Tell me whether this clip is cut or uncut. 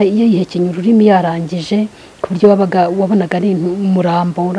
uncut